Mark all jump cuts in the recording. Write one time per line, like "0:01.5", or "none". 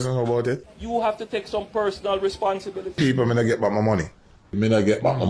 0:02.9